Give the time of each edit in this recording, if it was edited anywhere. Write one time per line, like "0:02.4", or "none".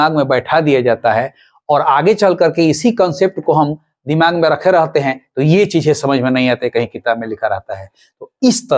none